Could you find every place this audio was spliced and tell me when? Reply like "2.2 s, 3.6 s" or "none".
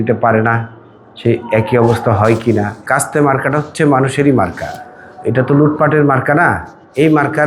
none